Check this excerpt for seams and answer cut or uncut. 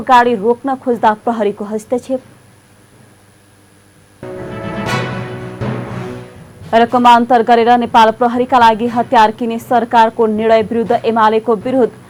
uncut